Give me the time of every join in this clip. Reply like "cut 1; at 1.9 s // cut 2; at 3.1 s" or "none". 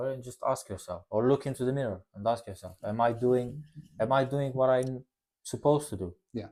none